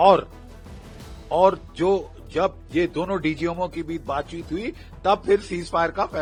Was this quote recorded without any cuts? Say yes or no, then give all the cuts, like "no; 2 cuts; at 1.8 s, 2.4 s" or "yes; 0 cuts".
yes; 0 cuts